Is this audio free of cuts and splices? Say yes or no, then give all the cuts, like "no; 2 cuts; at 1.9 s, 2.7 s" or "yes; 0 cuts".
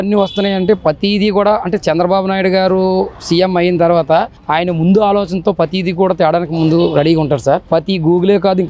yes; 0 cuts